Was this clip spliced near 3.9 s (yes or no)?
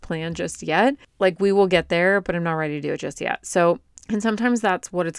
yes